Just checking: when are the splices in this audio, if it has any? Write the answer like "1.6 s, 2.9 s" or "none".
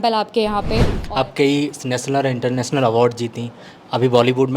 1.0 s